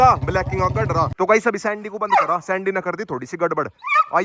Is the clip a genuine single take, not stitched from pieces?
no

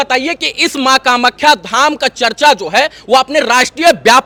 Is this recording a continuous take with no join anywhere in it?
yes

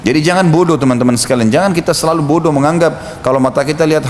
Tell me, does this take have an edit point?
no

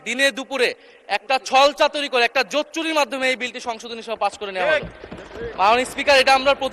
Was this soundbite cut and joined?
no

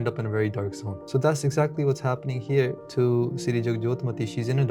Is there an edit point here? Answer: yes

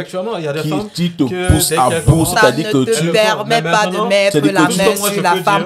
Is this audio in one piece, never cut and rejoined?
yes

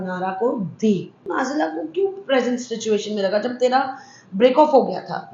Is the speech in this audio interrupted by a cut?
yes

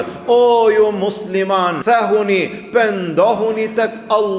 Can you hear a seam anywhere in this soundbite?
yes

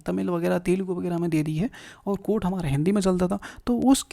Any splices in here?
no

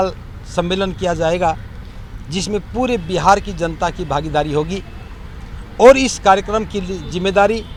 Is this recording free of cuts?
yes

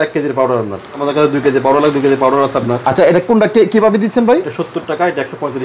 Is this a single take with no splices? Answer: no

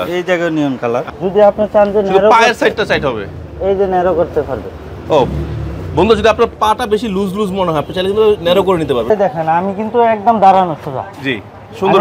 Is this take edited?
yes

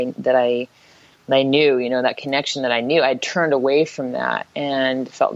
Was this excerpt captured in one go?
yes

